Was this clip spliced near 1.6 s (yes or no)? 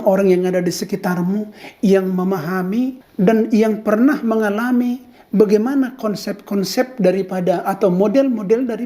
no